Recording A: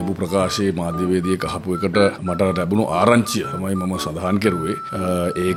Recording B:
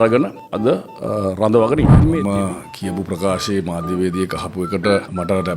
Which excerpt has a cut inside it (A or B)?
B